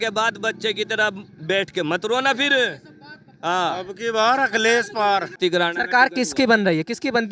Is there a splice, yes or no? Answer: yes